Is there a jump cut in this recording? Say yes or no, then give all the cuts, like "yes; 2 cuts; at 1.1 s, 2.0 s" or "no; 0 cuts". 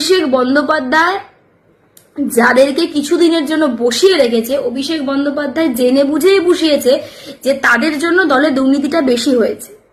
no; 0 cuts